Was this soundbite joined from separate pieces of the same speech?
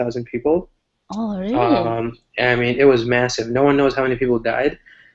yes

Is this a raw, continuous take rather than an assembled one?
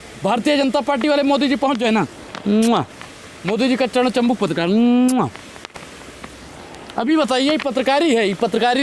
yes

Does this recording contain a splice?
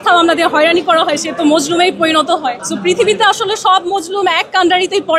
yes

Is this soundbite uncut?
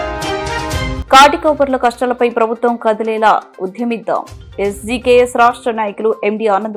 yes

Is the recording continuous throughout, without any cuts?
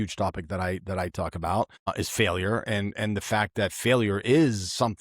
no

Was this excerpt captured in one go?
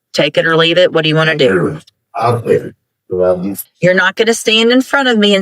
no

